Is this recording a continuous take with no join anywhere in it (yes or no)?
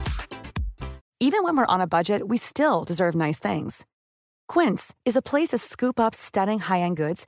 yes